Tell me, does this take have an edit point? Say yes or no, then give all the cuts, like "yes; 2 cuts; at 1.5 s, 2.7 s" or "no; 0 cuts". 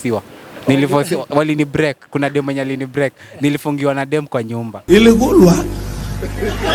yes; 1 cut; at 4.8 s